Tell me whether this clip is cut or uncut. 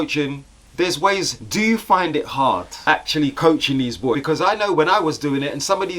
cut